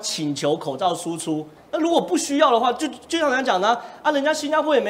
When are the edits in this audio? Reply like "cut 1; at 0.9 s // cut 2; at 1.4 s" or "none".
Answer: cut 1; at 1.5 s